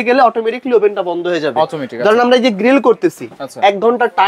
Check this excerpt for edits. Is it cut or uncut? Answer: uncut